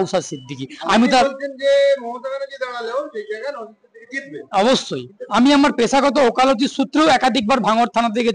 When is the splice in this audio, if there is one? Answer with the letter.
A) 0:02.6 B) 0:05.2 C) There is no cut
B